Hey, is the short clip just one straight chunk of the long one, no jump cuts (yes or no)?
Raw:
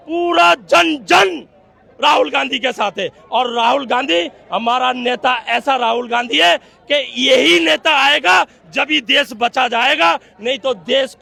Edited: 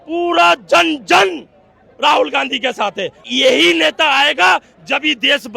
no